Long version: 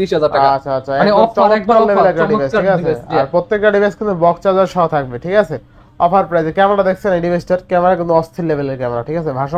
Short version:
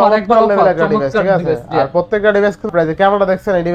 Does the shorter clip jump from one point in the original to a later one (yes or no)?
yes